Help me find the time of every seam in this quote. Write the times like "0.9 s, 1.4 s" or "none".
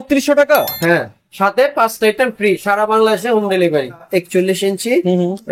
4.0 s

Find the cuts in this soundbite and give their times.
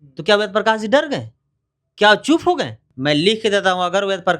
2.8 s

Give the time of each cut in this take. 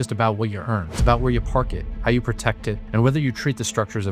0.9 s

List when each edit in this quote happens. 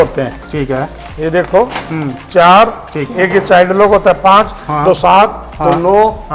none

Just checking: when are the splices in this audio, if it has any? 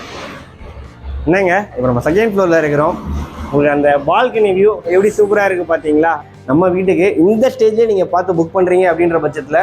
6.2 s

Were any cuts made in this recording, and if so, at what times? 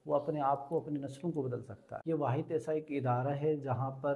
1.8 s

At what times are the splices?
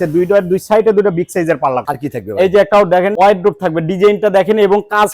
1.8 s, 3.1 s

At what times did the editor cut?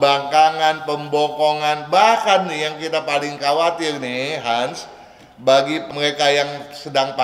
5.9 s

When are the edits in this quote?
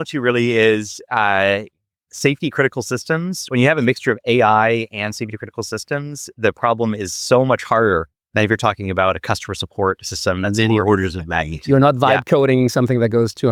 none

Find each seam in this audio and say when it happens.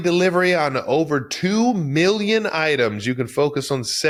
none

